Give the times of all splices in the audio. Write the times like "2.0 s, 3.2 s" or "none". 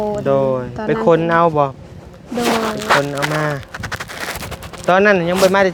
none